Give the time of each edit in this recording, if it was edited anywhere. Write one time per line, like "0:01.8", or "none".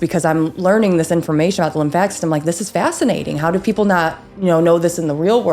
none